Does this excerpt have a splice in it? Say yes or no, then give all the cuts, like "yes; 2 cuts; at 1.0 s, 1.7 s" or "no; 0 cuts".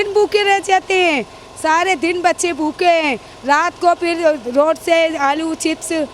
no; 0 cuts